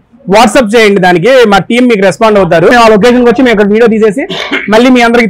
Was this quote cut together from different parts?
yes; 1 cut; at 2.7 s

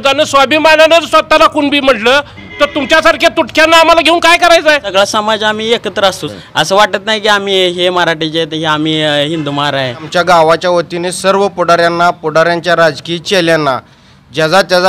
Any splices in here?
yes; 3 cuts; at 4.9 s, 6.2 s, 10.1 s

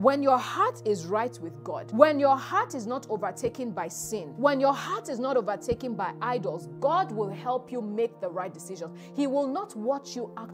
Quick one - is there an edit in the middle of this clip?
yes; 2 cuts; at 1.7 s, 4.3 s

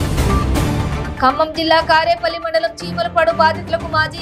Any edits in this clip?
no; 0 cuts

